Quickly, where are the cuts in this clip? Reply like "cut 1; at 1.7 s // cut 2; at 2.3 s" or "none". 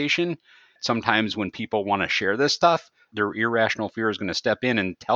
cut 1; at 0.8 s // cut 2; at 3.1 s

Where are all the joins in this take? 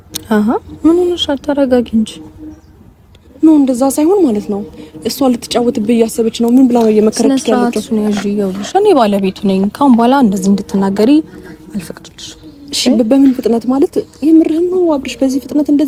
none

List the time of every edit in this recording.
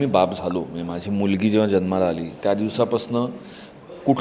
none

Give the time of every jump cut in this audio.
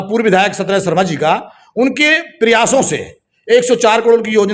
none

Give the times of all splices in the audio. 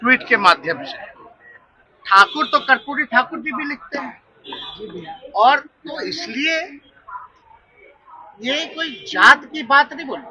cut 1; at 1.9 s

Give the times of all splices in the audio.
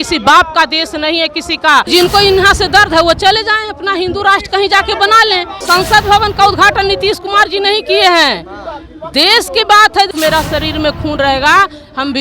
cut 1; at 1.9 s // cut 2; at 5.6 s // cut 3; at 10.1 s

